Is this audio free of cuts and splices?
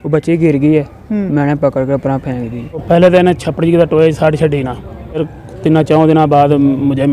no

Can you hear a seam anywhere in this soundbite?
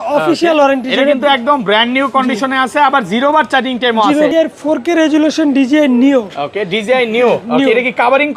yes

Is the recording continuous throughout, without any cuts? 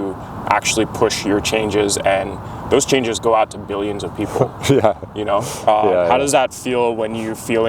yes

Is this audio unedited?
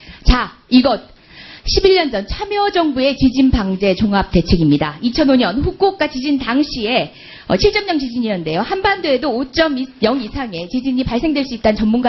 no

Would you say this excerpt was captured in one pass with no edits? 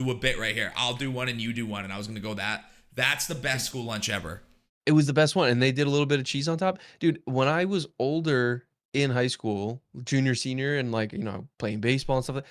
no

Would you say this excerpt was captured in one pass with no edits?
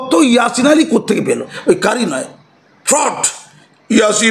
no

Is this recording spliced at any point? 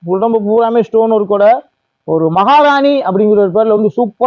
no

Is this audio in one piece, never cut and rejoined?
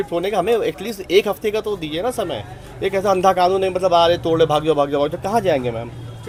yes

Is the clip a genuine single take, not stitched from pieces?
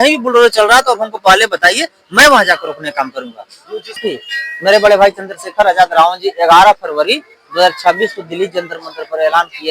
no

